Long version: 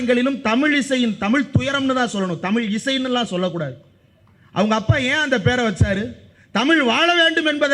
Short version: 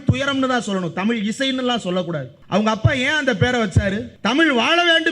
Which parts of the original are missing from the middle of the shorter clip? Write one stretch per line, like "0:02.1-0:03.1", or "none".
0:03.8-0:04.4
0:06.1-0:06.4